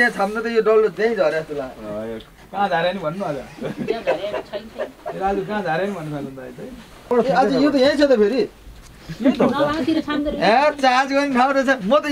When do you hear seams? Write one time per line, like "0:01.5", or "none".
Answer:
0:07.1